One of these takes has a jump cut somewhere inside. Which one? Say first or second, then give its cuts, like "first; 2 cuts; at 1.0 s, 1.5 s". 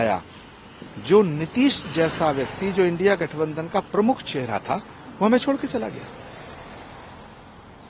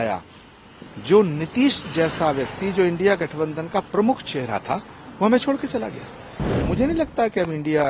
second; 1 cut; at 6.5 s